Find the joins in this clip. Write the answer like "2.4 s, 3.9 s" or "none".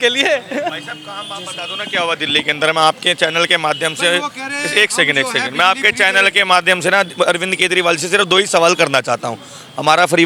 none